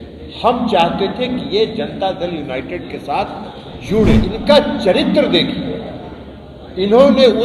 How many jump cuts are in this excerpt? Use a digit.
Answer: 1